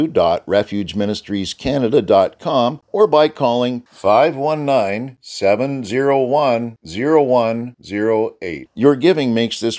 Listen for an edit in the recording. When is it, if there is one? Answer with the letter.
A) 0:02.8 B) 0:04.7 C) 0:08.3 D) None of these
A